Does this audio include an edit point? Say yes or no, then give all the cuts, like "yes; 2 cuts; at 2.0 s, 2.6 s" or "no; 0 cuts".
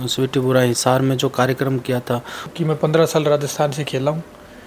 yes; 1 cut; at 2.5 s